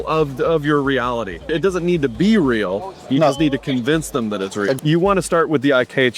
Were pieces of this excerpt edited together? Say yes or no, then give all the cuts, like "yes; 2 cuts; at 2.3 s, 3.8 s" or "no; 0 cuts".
yes; 2 cuts; at 1.5 s, 4.8 s